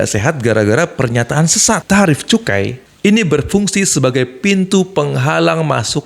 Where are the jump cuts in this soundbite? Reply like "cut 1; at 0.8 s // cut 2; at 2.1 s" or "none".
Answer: cut 1; at 1.8 s

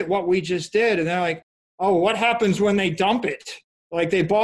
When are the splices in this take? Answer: none

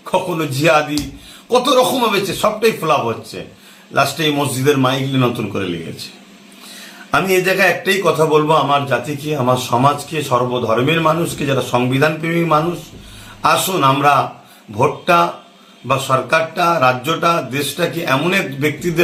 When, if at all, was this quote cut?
none

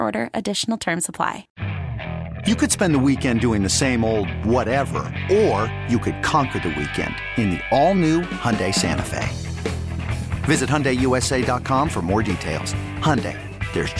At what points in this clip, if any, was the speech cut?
cut 1; at 1.5 s

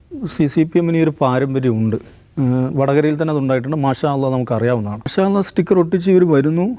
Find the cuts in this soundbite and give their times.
cut 1; at 5.1 s

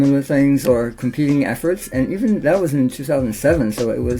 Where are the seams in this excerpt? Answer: none

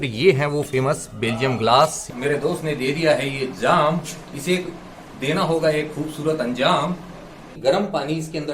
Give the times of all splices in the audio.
cut 1; at 2.1 s // cut 2; at 7.5 s

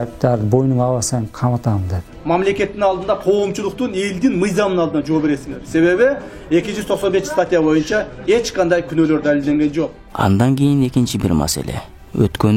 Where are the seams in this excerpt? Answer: cut 1; at 2.1 s // cut 2; at 10.0 s

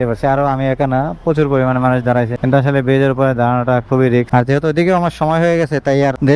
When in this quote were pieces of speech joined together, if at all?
cut 1; at 4.3 s

